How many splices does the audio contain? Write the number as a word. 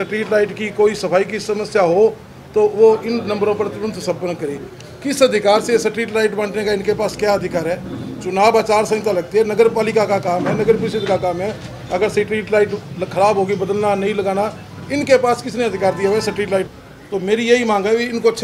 one